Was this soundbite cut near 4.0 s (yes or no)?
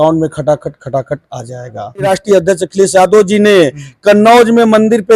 no